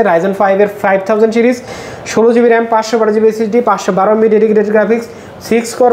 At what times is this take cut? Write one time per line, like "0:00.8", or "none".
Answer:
none